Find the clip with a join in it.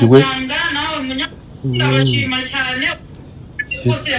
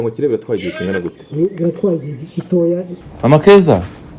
second; 1 cut; at 3.0 s

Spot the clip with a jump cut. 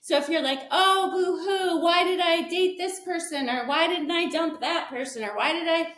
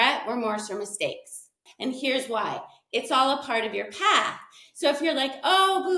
second; 1 cut; at 1.6 s

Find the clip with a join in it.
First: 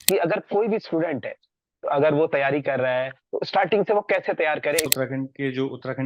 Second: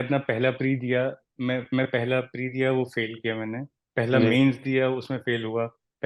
first; 2 cuts; at 3.2 s, 4.9 s

